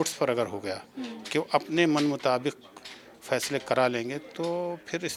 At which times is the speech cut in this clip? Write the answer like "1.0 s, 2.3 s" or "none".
none